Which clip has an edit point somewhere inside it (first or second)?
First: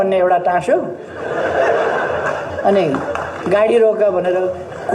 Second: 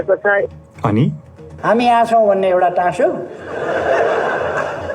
second